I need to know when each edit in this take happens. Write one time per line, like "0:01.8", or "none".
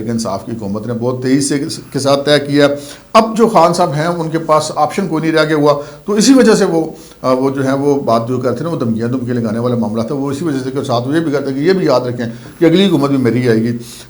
none